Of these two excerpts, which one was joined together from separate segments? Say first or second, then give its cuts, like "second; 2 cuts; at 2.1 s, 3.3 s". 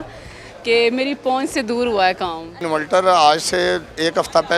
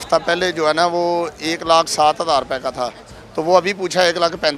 first; 1 cut; at 2.6 s